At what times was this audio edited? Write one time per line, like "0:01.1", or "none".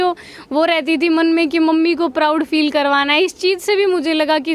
none